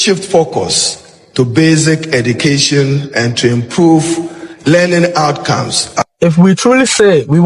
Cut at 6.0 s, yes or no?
yes